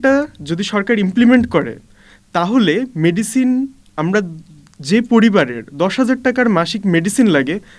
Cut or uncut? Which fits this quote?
uncut